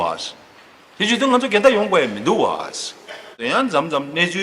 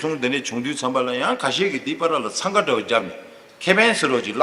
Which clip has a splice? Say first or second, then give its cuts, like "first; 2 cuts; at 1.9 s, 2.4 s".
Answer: first; 1 cut; at 3.4 s